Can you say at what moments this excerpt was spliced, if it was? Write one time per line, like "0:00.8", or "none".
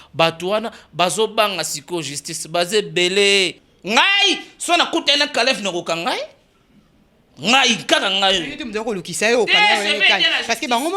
0:03.7